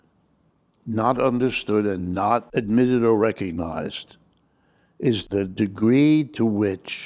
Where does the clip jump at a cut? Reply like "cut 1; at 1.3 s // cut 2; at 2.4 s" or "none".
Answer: cut 1; at 2.5 s // cut 2; at 5.3 s